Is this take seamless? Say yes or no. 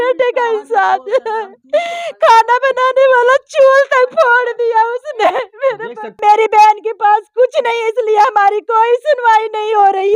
no